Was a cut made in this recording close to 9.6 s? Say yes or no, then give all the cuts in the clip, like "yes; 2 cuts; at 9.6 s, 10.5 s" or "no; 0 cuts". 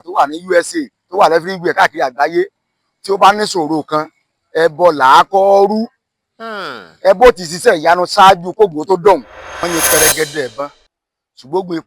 yes; 1 cut; at 9.6 s